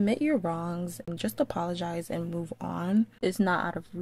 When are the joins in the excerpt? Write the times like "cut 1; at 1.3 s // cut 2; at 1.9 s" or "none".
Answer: cut 1; at 1.0 s // cut 2; at 3.1 s